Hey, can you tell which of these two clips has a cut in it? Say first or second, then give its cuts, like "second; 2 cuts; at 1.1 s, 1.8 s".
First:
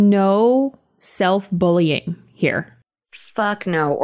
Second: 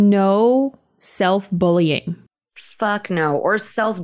second; 1 cut; at 2.2 s